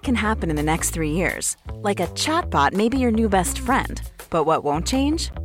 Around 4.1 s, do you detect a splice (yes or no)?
no